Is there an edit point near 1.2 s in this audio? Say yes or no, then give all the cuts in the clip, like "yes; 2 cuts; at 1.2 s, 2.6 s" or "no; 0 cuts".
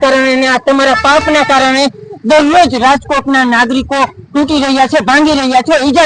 no; 0 cuts